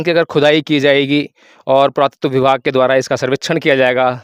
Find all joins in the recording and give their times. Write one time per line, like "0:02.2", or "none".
none

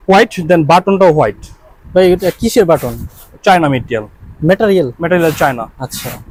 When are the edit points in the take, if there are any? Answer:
none

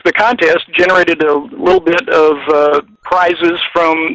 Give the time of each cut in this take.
0:03.0

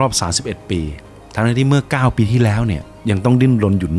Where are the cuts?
0:01.0

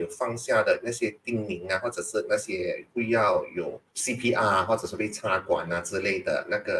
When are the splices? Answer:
0:02.9
0:03.9

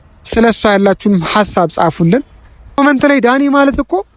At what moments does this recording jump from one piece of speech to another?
0:02.8

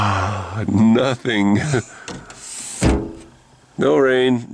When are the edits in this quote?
none

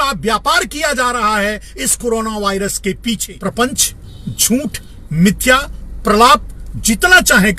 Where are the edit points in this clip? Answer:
0:03.4

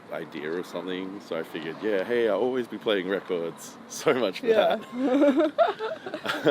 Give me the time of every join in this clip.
none

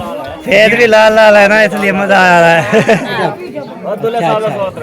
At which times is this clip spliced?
0:03.1

